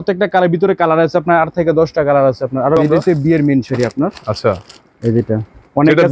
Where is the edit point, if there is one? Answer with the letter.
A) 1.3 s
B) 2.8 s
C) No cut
B